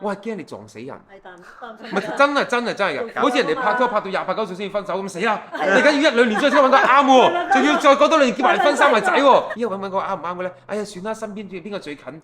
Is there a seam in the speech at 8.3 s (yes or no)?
no